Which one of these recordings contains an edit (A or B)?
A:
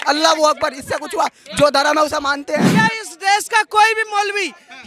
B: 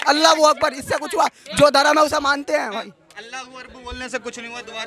A